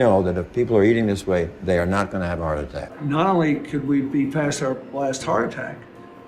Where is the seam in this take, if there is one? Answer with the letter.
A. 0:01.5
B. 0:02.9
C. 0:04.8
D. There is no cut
B